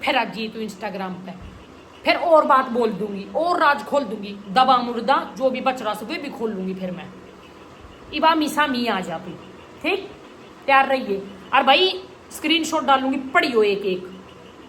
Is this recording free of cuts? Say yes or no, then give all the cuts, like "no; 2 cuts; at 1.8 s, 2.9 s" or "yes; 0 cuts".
yes; 0 cuts